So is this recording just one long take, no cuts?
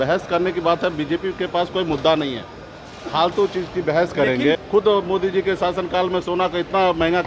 no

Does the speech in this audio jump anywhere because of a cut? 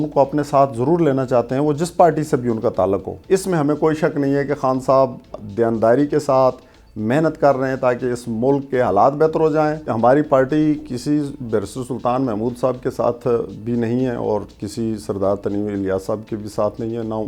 yes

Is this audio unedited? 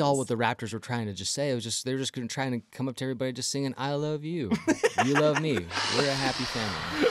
yes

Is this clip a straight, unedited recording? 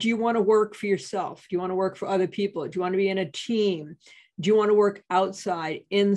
yes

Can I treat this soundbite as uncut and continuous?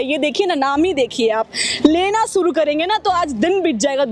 yes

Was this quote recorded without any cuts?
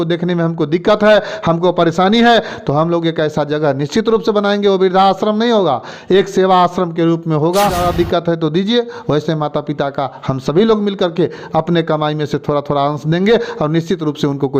no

